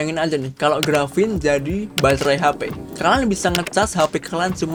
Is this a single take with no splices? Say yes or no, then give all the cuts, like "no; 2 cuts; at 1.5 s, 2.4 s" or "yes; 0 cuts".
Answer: yes; 0 cuts